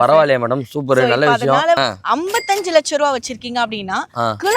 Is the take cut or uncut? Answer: cut